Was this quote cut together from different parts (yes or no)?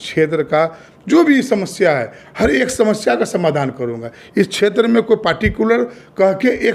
no